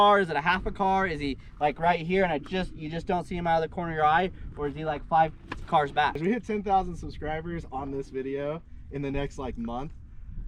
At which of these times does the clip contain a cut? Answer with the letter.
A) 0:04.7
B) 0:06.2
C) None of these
B